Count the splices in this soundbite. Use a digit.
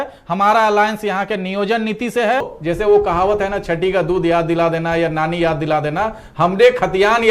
1